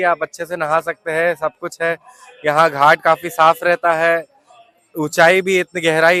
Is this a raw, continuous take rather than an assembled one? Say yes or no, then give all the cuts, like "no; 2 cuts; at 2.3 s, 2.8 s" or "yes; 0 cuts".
yes; 0 cuts